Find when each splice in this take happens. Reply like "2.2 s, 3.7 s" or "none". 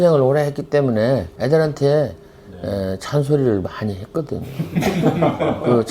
1.3 s